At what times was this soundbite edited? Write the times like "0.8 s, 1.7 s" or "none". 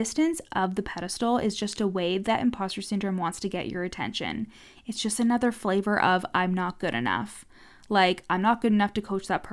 none